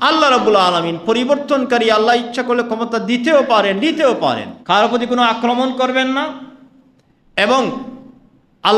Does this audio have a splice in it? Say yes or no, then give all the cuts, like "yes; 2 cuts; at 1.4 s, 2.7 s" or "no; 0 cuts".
yes; 1 cut; at 4.5 s